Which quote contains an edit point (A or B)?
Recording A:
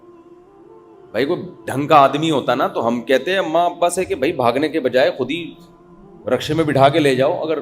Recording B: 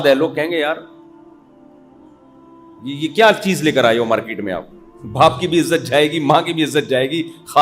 A